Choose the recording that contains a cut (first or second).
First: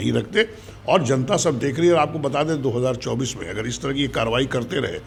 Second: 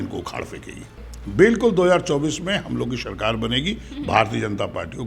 second